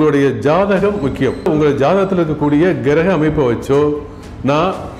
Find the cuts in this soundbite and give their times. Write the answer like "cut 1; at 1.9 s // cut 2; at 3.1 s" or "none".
cut 1; at 1.5 s